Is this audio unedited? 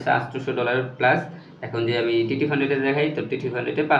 yes; 0 cuts

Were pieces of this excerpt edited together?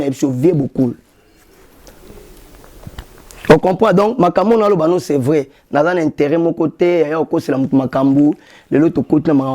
no; 0 cuts

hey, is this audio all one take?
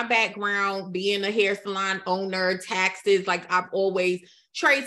yes; 0 cuts

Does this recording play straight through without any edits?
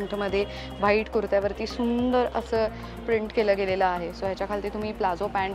yes; 0 cuts

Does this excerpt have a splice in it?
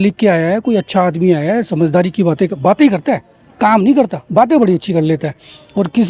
no; 0 cuts

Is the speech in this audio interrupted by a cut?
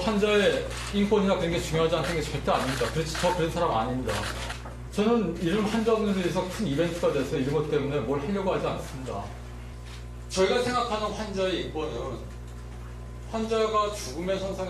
no; 0 cuts

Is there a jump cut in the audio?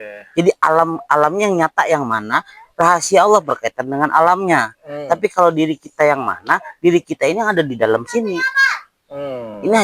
no; 0 cuts

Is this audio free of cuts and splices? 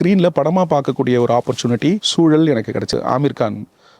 no; 2 cuts; at 2.1 s, 3.0 s

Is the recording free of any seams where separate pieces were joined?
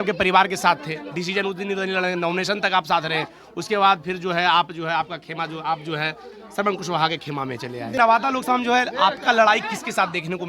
no; 1 cut; at 8.0 s

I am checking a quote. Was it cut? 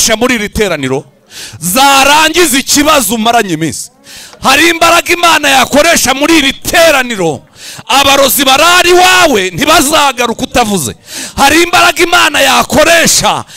no; 0 cuts

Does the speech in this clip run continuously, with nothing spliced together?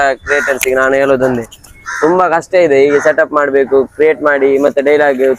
yes; 0 cuts

